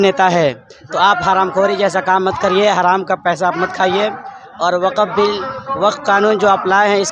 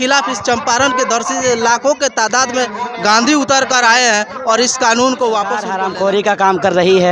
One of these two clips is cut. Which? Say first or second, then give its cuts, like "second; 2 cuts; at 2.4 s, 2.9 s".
second; 1 cut; at 5.7 s